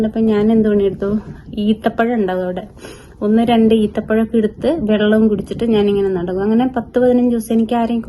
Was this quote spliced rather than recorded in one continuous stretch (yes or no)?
no